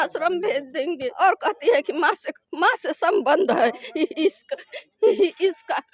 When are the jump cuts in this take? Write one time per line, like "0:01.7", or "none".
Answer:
0:01.1